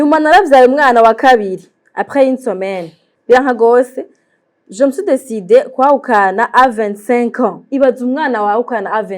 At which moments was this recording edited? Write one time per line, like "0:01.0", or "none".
0:03.1